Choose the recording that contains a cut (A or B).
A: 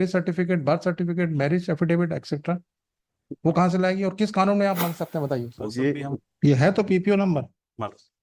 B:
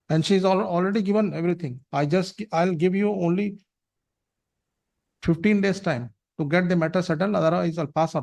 A